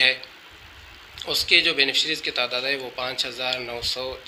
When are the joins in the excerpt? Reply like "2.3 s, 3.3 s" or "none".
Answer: none